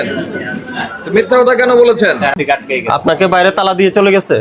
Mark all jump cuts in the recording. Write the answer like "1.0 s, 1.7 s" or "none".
2.3 s